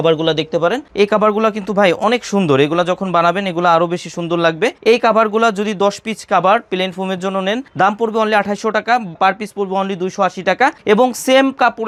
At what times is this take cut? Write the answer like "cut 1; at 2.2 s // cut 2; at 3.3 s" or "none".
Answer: none